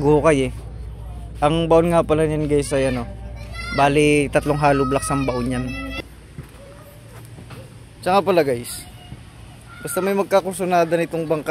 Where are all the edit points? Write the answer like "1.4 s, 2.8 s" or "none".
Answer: 6.0 s